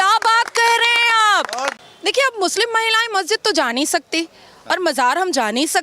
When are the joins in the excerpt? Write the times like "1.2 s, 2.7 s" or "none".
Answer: 1.8 s